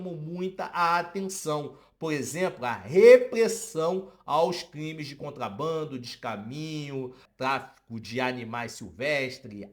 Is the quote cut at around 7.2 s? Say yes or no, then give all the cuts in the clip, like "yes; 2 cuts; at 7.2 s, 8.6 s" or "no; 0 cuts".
yes; 1 cut; at 7.2 s